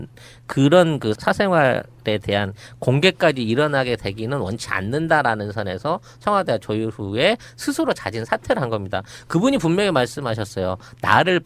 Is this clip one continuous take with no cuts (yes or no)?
yes